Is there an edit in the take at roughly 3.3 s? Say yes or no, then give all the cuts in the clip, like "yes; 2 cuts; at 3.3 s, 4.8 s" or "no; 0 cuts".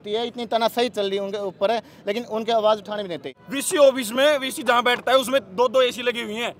yes; 1 cut; at 3.3 s